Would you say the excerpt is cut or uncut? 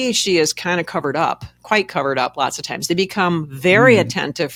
uncut